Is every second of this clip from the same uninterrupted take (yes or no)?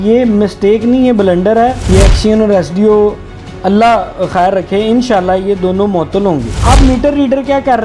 no